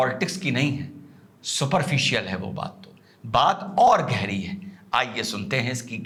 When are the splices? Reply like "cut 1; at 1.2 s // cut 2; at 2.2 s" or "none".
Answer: none